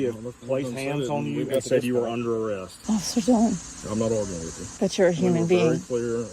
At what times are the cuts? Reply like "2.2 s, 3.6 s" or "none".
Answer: 2.7 s, 3.7 s, 4.6 s

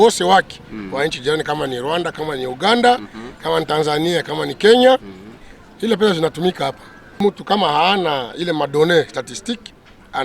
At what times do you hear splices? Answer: 7.2 s

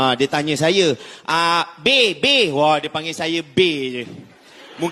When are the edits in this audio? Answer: none

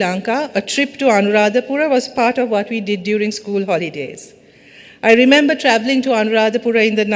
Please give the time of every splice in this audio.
none

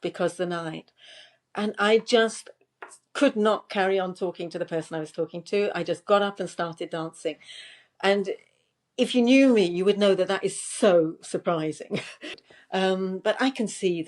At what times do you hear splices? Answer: 12.4 s

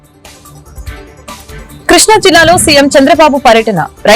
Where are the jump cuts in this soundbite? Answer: 1.2 s

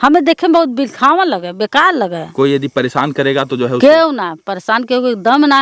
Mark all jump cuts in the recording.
2.2 s

